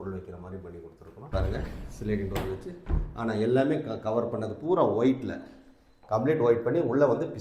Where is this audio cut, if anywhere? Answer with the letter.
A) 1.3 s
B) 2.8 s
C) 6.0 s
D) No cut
A